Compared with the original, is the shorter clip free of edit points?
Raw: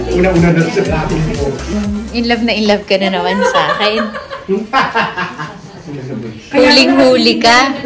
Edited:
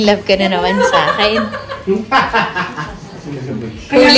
yes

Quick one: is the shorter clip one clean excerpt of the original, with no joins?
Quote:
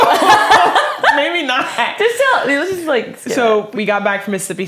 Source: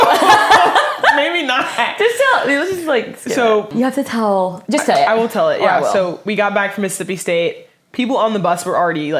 no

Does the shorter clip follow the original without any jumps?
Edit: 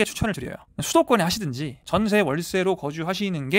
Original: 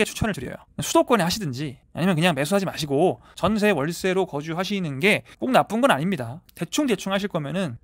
no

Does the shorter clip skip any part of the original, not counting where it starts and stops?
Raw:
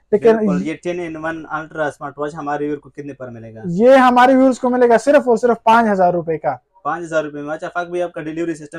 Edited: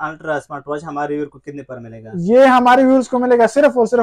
no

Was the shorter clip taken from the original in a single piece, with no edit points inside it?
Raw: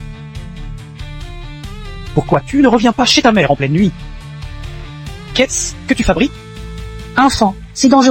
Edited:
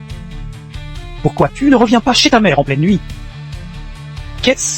no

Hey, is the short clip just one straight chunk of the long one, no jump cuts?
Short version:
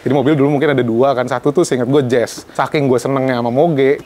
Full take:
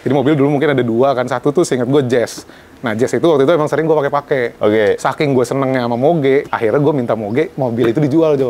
no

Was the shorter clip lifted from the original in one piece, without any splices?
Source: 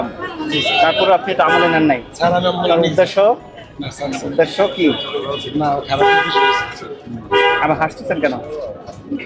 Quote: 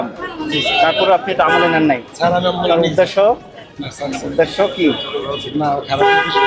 yes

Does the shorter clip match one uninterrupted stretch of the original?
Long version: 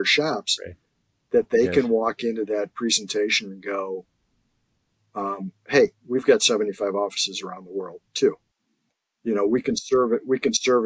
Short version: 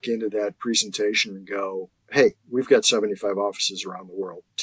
no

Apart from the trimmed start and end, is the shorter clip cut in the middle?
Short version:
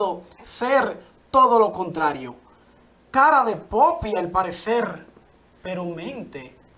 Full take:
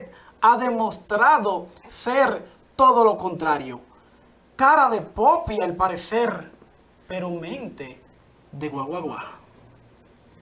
no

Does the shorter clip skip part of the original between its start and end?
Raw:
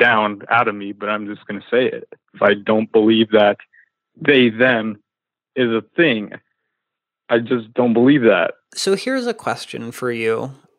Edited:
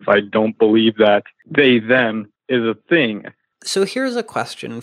yes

